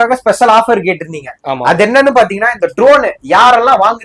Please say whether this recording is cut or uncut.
uncut